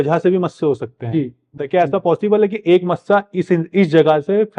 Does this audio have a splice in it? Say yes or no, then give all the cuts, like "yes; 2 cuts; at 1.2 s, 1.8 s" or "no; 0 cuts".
yes; 1 cut; at 1.6 s